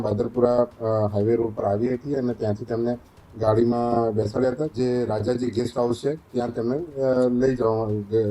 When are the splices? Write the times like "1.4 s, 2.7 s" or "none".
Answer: 4.7 s